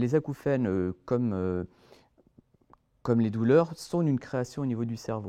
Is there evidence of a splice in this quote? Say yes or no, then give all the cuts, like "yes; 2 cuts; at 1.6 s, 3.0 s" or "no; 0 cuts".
no; 0 cuts